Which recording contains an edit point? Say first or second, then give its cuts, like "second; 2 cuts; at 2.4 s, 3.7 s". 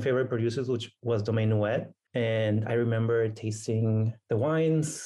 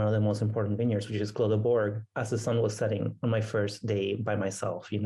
first; 3 cuts; at 0.9 s, 2.0 s, 4.2 s